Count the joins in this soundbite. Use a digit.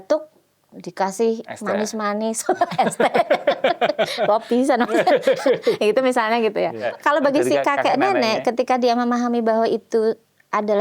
1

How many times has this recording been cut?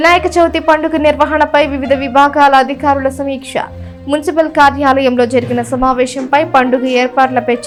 0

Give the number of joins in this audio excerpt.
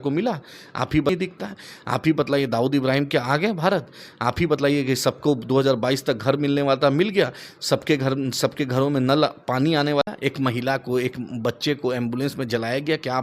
2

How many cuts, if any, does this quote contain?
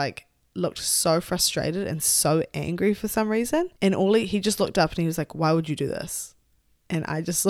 1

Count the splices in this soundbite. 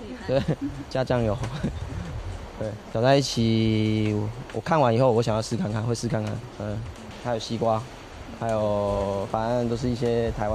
2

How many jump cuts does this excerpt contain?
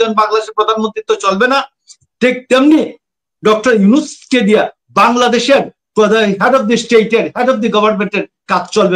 0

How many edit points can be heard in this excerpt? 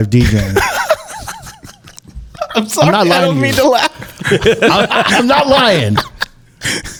0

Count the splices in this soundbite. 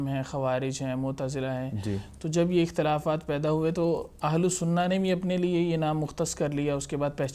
0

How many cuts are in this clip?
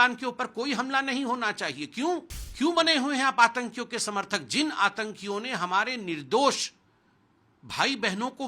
1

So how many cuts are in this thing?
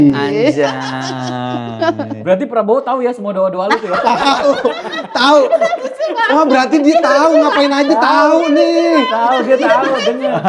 0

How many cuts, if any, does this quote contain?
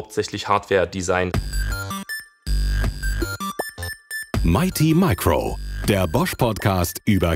1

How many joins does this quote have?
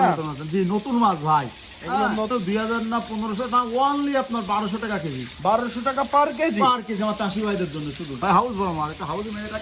2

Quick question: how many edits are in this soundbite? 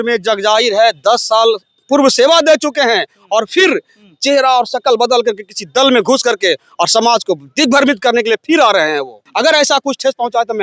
1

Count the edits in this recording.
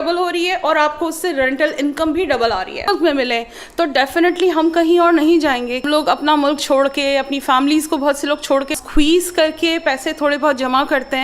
3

